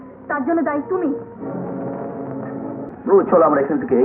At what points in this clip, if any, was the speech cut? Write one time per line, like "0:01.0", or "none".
0:02.9